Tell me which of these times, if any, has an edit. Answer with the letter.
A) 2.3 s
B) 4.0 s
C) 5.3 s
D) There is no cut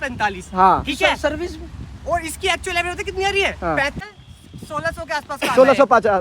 B